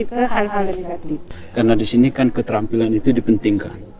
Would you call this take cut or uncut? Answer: cut